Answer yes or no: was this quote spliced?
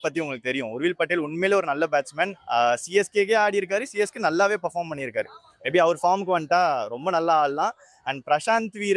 no